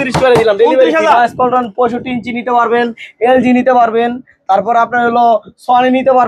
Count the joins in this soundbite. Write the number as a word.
one